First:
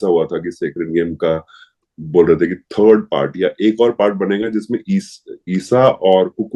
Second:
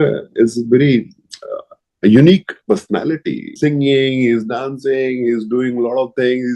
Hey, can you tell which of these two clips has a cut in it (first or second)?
second